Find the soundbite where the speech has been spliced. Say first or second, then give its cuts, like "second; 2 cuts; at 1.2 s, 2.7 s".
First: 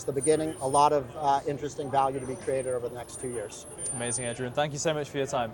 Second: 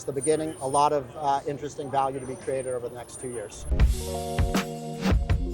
second; 1 cut; at 3.6 s